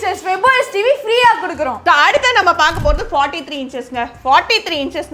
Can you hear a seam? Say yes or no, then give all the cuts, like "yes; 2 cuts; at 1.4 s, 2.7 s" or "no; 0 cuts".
yes; 1 cut; at 1.8 s